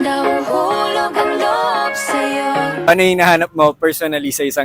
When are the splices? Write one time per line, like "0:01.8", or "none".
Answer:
0:02.9